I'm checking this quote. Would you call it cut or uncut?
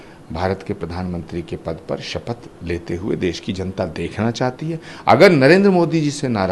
uncut